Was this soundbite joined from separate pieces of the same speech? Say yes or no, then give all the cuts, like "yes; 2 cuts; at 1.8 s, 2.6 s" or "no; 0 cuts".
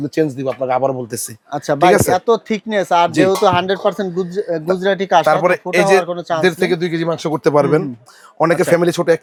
no; 0 cuts